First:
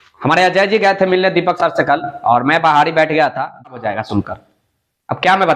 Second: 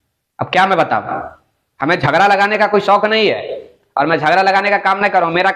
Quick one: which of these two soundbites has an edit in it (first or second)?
first